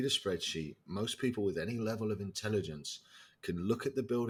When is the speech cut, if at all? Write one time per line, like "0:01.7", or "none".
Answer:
none